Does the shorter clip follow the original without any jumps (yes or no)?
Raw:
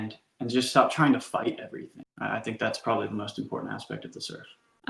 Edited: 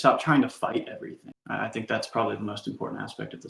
yes